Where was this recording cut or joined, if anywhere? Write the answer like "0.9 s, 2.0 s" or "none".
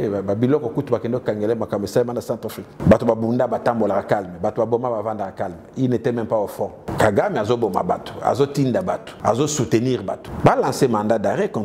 2.7 s, 6.9 s, 9.1 s, 10.3 s